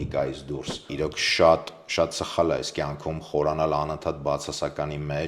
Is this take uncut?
no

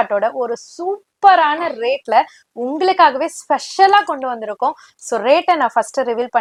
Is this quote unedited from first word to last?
yes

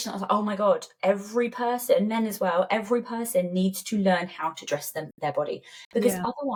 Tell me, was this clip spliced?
no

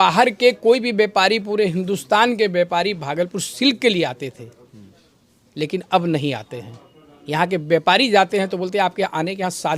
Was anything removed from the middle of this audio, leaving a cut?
no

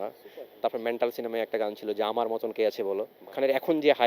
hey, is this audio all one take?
no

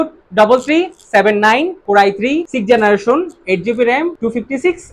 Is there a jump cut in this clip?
no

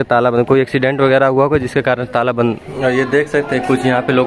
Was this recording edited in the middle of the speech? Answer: yes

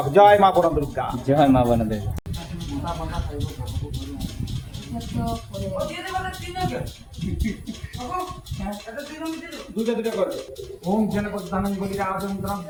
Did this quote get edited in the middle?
no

